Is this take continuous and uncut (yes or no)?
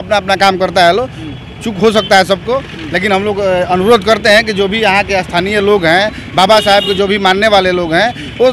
yes